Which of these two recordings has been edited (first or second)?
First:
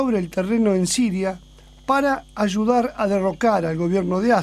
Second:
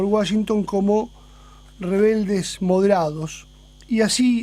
first